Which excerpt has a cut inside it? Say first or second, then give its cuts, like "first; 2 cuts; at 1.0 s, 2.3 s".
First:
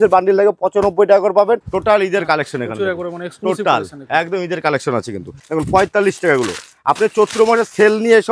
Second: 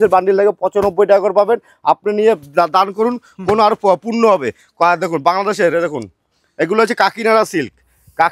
first; 2 cuts; at 1.7 s, 5.4 s